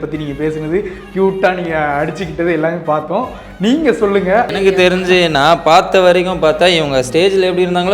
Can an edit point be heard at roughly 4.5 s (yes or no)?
yes